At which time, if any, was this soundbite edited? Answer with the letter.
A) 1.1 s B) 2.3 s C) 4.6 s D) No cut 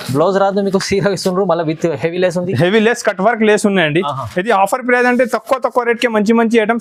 D